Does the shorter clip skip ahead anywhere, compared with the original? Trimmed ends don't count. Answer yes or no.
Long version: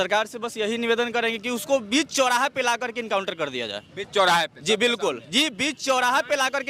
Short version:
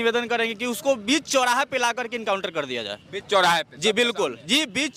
no